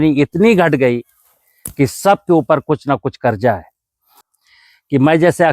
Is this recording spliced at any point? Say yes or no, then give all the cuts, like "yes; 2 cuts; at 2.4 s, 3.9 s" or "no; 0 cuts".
yes; 1 cut; at 4.2 s